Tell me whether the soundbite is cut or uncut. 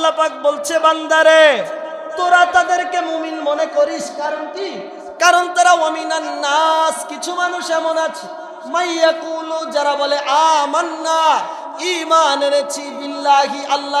uncut